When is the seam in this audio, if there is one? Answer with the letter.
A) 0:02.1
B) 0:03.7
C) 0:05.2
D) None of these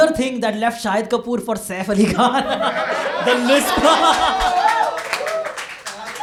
D